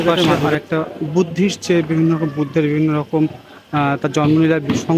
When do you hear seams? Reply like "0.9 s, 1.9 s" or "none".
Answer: none